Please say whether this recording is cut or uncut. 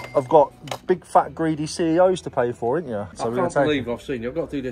cut